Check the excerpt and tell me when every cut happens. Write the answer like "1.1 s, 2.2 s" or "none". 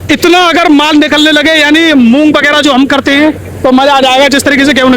none